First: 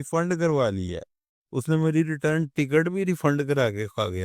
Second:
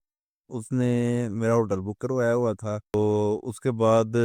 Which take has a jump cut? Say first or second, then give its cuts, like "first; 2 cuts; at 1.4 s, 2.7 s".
second; 1 cut; at 2.9 s